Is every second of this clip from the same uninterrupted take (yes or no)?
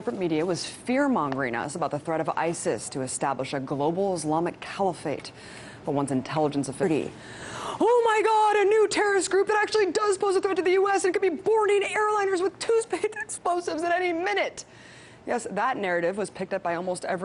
yes